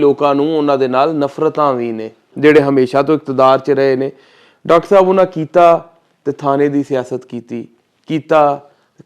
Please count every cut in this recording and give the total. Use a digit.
1